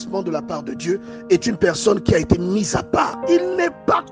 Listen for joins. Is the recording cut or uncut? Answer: cut